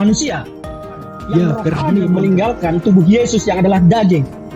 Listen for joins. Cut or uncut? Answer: cut